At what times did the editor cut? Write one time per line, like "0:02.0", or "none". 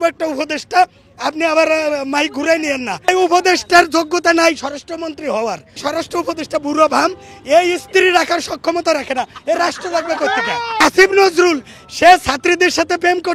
0:03.1
0:05.8
0:10.8